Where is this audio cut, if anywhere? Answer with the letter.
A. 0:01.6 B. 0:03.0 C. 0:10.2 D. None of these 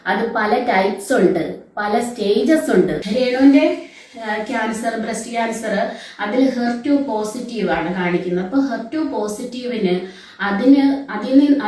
B